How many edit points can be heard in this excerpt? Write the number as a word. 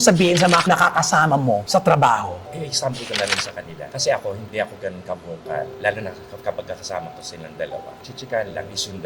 three